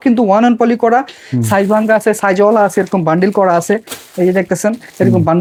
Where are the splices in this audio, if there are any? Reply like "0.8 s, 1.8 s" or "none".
none

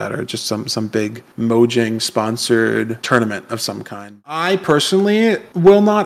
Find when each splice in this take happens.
4.3 s

